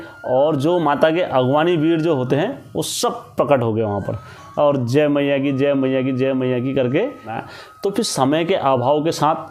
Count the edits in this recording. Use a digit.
1